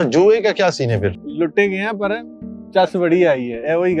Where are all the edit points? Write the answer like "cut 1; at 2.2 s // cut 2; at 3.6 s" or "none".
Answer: cut 1; at 1.1 s